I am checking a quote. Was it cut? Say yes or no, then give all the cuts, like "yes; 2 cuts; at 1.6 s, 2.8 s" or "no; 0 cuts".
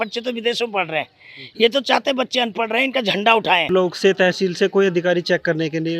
yes; 1 cut; at 3.6 s